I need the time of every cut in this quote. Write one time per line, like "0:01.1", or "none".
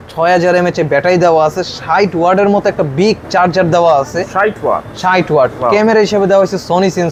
none